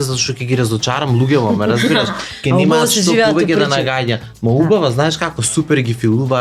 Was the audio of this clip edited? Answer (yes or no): no